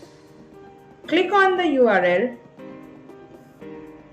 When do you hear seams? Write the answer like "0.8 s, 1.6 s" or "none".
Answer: 1.0 s, 2.4 s